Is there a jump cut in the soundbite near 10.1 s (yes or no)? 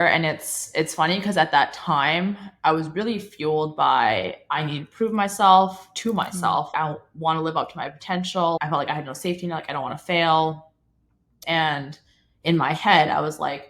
no